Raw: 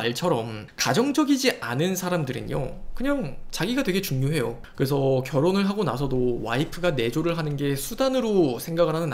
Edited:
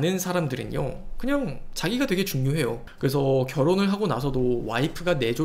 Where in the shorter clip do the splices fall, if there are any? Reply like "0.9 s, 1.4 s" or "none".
none